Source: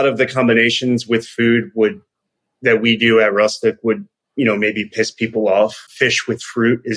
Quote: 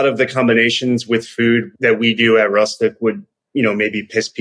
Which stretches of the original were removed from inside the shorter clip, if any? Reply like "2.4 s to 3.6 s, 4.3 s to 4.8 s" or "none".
1.7 s to 2.5 s